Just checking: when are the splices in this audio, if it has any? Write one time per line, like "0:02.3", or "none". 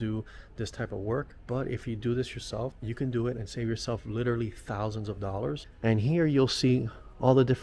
0:01.4
0:02.8
0:05.7